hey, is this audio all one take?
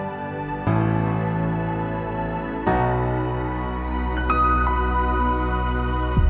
yes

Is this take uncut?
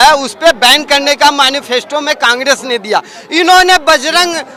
yes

